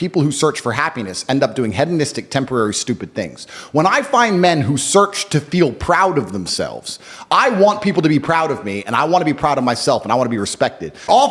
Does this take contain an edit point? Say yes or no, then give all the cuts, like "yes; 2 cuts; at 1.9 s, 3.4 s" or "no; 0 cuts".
no; 0 cuts